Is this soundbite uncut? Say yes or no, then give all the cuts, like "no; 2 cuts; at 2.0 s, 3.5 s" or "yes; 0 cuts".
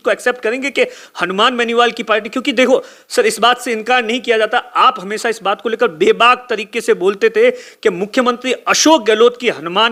yes; 0 cuts